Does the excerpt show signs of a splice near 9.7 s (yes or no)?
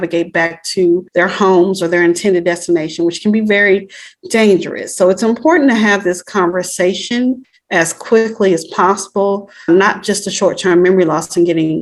yes